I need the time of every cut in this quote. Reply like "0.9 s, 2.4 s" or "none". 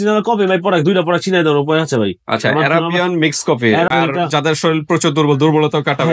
3.9 s